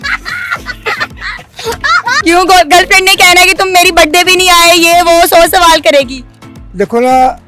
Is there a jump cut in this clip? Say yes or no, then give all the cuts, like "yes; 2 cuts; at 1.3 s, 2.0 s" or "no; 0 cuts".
no; 0 cuts